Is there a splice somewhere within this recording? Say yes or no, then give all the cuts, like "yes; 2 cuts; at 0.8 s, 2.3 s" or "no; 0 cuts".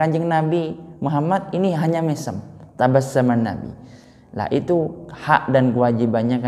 no; 0 cuts